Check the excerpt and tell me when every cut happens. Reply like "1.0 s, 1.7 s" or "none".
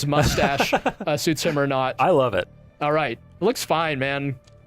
1.9 s

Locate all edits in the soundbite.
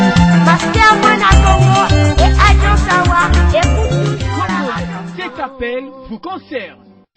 5.1 s

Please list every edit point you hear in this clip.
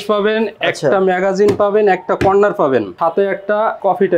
2.9 s

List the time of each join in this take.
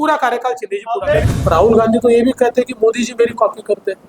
1.3 s

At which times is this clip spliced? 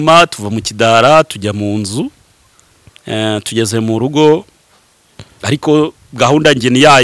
none

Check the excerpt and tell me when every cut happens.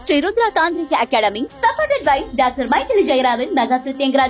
none

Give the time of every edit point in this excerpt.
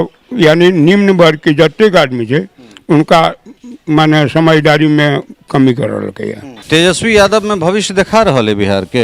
6.5 s

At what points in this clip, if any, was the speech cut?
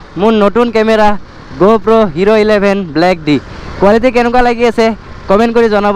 none

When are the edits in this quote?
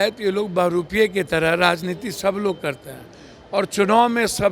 none

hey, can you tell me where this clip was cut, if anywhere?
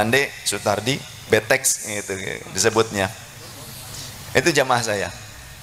none

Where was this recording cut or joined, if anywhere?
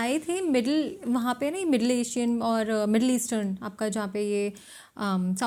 none

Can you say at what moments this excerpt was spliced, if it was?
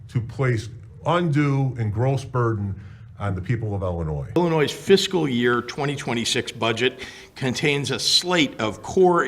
4.3 s

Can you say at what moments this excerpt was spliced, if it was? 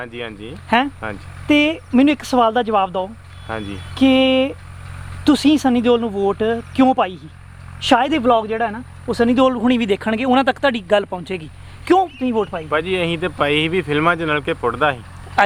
none

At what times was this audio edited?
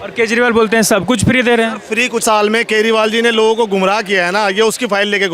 2.2 s

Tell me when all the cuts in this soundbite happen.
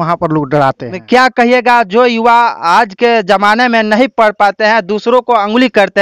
0.9 s

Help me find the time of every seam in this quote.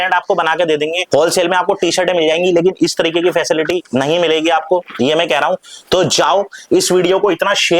1.0 s

